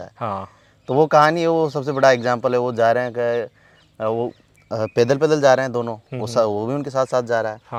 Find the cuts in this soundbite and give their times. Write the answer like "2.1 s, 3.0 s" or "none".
none